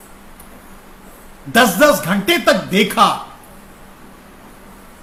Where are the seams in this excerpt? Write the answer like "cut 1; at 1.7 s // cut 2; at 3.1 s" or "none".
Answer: none